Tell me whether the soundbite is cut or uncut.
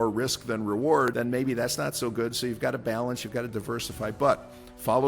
cut